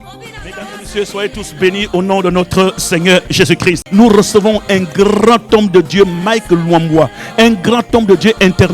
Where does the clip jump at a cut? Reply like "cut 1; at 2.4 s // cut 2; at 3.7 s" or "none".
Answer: cut 1; at 3.8 s